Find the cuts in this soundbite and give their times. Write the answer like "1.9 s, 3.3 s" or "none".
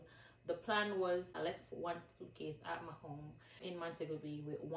1.3 s, 3.6 s